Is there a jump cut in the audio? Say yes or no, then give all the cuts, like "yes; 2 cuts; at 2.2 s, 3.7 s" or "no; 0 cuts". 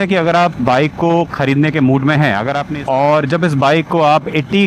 yes; 1 cut; at 2.6 s